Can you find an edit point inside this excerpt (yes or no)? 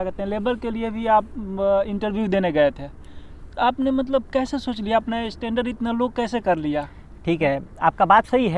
no